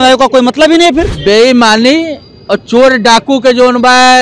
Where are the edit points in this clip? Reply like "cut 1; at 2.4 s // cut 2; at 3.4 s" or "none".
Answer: cut 1; at 1.1 s